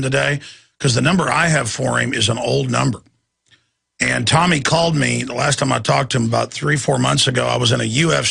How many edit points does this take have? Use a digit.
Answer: 0